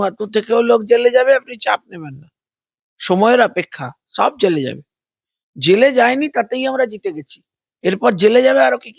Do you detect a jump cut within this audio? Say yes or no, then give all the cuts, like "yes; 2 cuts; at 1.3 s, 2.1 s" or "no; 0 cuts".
no; 0 cuts